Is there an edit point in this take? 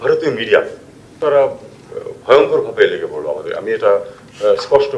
yes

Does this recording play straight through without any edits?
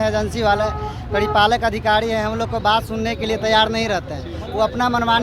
yes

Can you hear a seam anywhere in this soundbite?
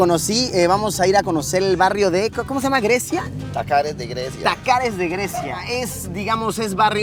no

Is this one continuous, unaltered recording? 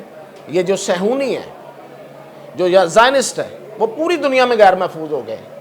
yes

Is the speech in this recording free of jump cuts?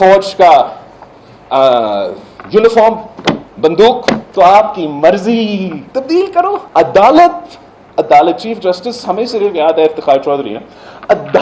no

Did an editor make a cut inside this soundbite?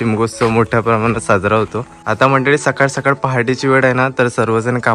yes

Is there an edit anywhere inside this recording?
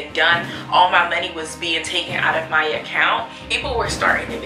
yes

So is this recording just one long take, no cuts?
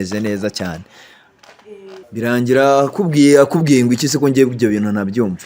no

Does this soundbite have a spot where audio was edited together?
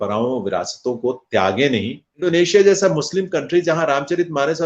yes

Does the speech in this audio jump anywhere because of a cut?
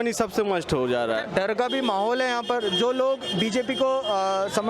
no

